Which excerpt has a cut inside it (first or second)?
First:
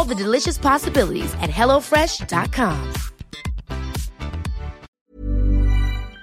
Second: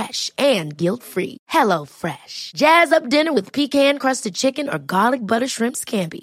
first